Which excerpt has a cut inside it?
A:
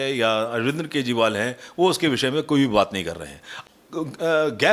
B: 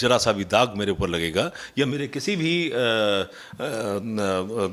A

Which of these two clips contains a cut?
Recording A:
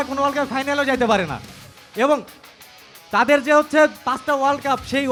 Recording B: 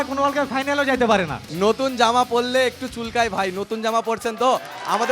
B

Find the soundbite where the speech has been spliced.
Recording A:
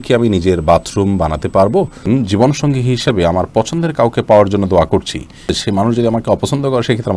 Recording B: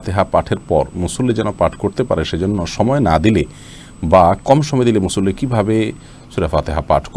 A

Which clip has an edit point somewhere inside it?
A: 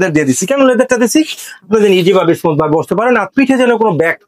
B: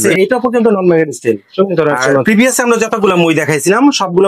B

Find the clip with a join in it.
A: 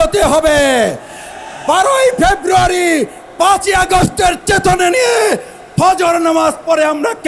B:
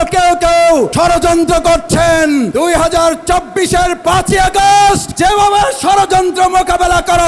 B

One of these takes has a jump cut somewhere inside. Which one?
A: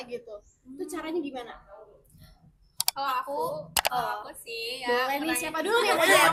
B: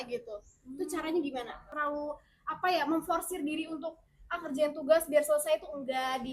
B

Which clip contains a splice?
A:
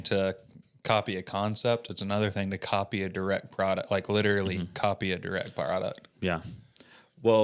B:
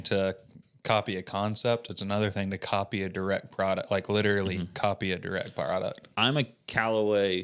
B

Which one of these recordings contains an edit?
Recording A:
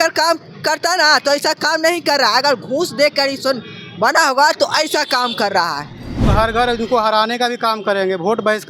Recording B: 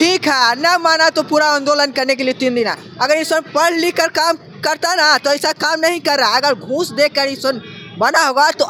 A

